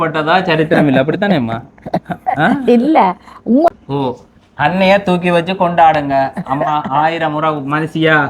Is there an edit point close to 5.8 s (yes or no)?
no